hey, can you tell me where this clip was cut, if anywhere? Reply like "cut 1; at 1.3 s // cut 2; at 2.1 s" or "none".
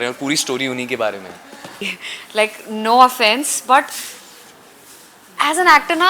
cut 1; at 1.8 s

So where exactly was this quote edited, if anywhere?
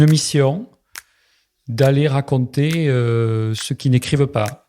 cut 1; at 3.6 s

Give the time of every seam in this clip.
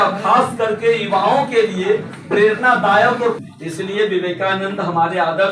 cut 1; at 3.4 s

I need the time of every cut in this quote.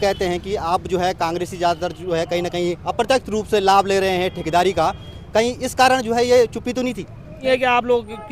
cut 1; at 7.4 s

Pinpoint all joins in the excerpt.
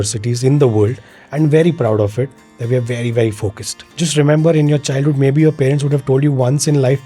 cut 1; at 3.8 s

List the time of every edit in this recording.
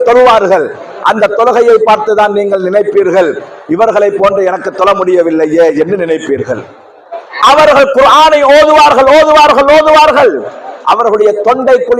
none

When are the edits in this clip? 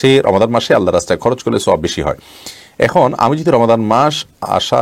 none

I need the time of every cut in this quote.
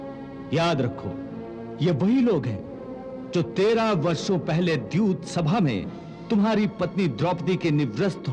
none

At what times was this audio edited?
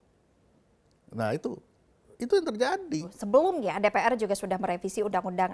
cut 1; at 3.2 s

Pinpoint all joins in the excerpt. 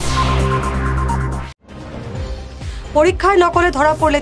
cut 1; at 2.4 s

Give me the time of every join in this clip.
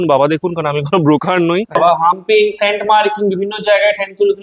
cut 1; at 1.8 s

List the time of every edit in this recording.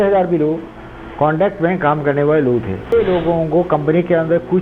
cut 1; at 2.9 s

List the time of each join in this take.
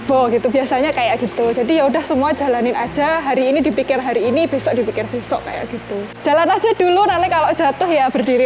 cut 1; at 6.1 s

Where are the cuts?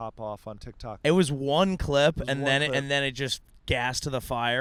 none

